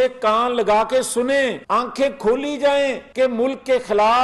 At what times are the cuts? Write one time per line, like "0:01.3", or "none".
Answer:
0:01.6
0:03.0